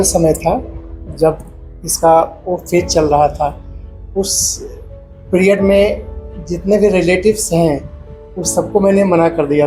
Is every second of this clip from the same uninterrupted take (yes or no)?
yes